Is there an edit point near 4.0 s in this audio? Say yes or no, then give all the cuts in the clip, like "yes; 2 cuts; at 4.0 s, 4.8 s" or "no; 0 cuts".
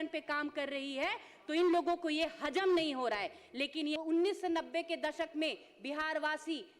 yes; 1 cut; at 4.0 s